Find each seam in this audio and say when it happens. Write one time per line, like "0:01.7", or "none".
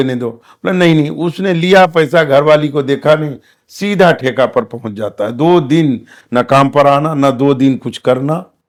none